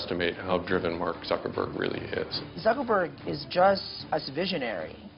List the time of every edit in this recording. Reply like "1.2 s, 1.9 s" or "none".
2.4 s, 3.9 s